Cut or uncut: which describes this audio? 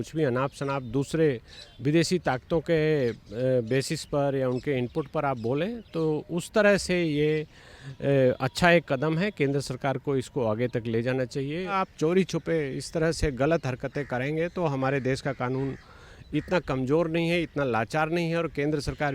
cut